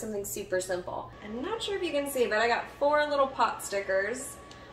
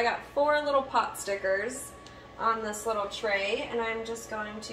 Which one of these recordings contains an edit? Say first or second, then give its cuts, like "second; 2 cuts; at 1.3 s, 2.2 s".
first; 1 cut; at 1.2 s